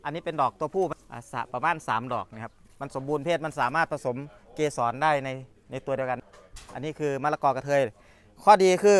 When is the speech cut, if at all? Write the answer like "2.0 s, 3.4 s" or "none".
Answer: 1.0 s, 6.3 s